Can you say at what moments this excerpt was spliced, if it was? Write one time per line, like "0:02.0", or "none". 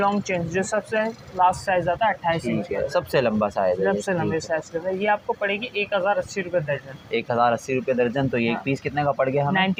none